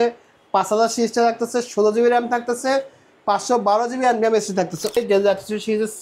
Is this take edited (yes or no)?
yes